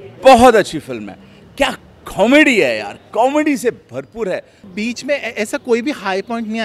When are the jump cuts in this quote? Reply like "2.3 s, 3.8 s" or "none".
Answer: 4.6 s